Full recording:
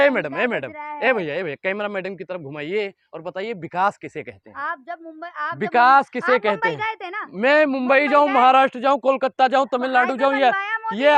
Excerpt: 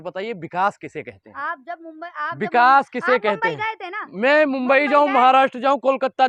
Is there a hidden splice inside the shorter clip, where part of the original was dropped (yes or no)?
no